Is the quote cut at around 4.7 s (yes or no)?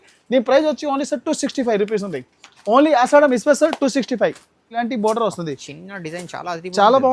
yes